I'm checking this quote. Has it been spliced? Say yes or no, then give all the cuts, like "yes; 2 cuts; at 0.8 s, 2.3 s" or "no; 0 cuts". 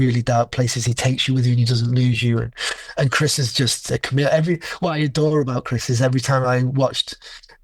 no; 0 cuts